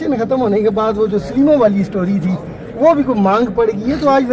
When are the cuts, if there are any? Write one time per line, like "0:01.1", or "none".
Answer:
none